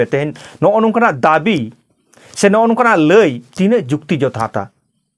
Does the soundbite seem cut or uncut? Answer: uncut